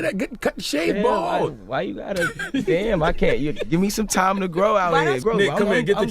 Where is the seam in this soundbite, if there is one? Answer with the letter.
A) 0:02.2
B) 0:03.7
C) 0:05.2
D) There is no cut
C